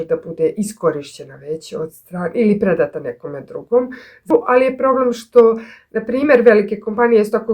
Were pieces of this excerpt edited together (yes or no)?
yes